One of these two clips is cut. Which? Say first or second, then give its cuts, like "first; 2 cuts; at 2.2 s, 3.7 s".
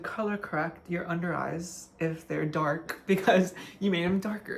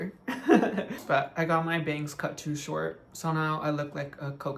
second; 1 cut; at 1.0 s